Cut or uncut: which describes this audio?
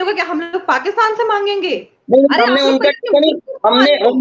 uncut